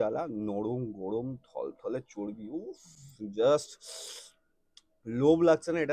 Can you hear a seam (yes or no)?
no